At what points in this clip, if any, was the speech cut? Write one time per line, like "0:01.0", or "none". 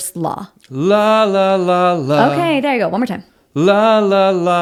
none